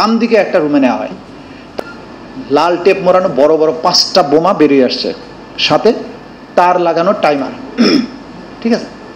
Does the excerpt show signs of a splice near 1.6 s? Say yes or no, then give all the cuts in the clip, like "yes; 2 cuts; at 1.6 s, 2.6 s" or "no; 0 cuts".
yes; 1 cut; at 1.6 s